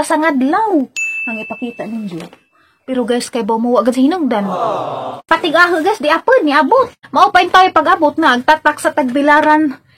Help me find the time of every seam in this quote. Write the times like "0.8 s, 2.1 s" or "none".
5.3 s, 7.0 s